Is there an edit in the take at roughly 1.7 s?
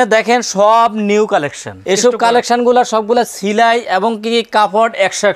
yes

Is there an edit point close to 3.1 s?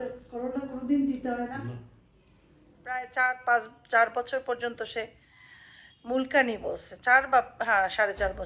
yes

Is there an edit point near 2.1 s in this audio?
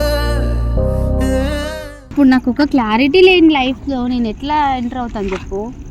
yes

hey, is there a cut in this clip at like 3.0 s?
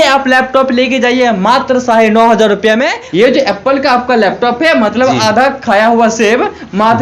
yes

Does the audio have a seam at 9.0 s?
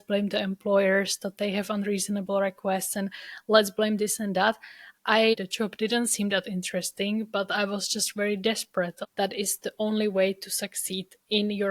yes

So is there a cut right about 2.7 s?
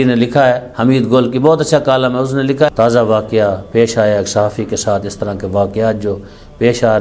yes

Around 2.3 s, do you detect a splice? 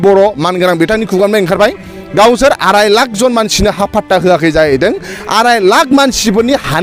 no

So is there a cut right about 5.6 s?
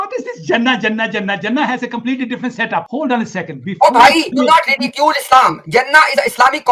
no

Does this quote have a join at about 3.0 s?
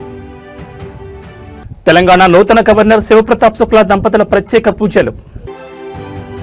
no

